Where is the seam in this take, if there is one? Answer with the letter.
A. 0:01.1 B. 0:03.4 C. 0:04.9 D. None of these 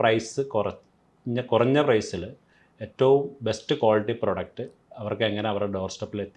D